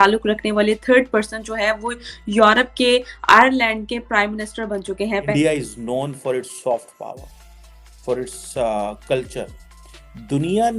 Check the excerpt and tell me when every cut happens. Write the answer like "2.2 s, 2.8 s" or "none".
5.3 s